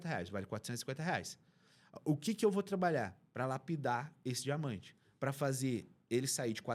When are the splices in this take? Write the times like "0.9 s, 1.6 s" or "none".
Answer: none

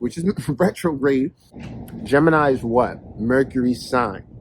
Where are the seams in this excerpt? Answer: 1.6 s

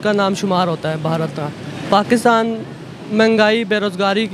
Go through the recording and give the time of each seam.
1.7 s

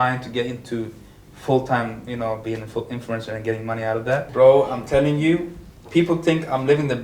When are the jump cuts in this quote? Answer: 4.3 s

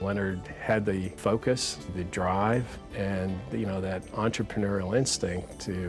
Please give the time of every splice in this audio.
1.2 s, 1.9 s, 2.8 s

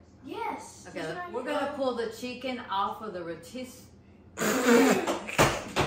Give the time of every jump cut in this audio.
1.3 s

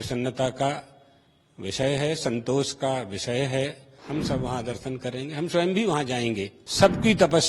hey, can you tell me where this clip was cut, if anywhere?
3.9 s, 6.6 s

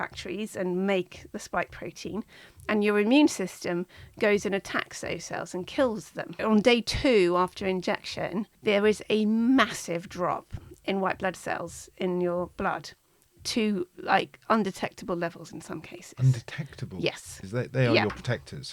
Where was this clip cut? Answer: 6.4 s, 8.5 s, 17.4 s

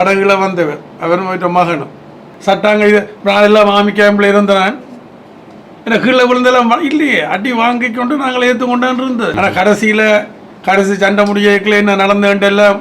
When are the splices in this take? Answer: 2.3 s, 9.3 s

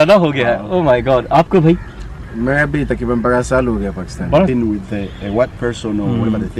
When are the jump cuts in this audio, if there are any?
4.5 s

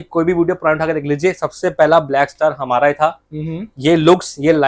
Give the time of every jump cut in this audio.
none

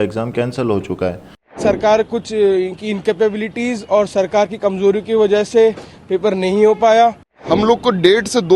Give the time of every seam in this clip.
1.5 s, 7.3 s

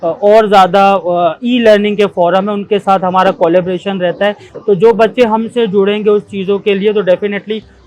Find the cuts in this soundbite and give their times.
4.5 s

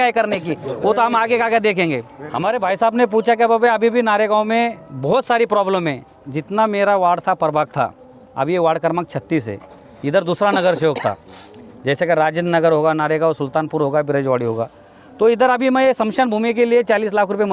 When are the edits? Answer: none

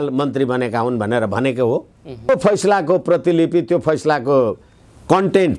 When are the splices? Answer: 2.3 s

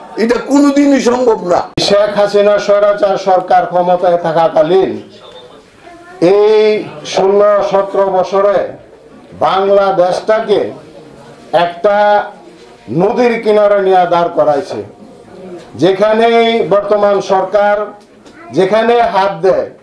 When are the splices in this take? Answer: 1.7 s

